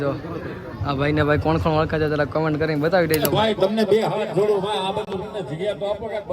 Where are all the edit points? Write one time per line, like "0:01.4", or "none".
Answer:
0:03.3